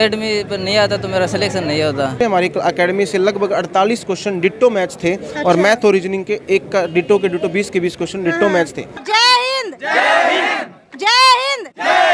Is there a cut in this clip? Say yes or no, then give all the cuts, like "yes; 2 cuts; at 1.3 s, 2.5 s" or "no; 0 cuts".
yes; 2 cuts; at 2.1 s, 8.9 s